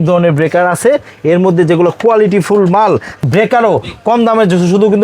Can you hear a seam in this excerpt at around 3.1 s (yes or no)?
yes